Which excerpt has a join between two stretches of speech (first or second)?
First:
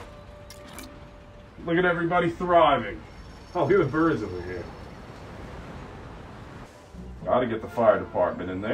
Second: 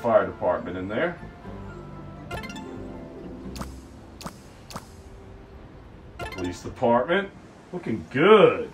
first